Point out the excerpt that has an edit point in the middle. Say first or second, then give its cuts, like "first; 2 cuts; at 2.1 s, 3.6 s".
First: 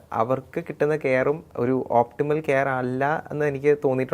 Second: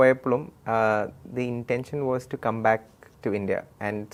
first; 1 cut; at 1.5 s